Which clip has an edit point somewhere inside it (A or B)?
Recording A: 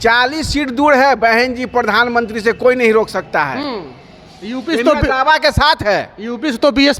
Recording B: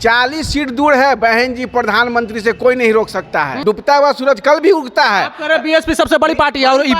B